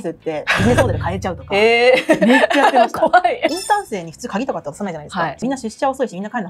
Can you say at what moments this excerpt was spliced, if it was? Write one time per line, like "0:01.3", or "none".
0:03.5
0:05.4